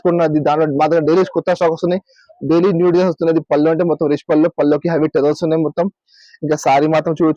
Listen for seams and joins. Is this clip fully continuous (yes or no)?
yes